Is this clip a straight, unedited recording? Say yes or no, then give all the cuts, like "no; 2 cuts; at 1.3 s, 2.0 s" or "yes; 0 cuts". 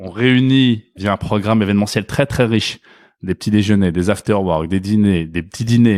no; 1 cut; at 0.9 s